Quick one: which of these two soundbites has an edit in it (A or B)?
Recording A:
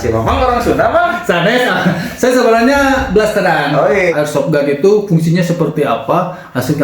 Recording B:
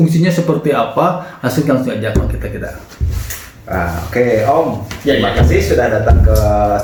A